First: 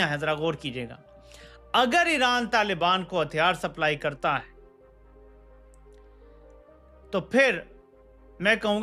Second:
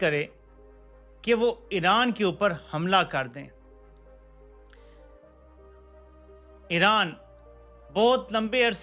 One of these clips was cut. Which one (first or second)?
second